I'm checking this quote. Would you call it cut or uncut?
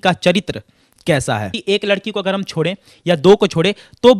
cut